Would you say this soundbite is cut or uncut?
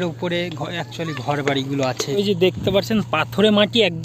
cut